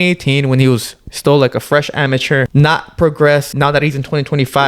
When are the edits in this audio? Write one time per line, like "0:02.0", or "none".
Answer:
0:02.5
0:03.5